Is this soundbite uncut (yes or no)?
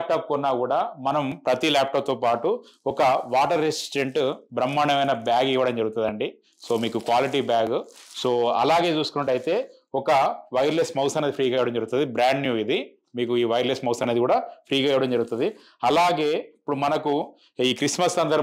yes